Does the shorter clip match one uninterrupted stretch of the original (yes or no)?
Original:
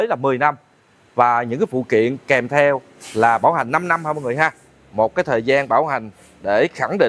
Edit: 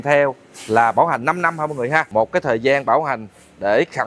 no